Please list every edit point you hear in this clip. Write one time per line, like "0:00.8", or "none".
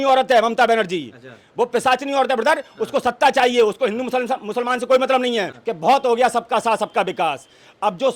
0:05.6